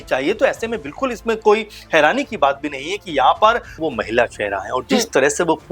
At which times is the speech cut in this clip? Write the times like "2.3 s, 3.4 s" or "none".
3.7 s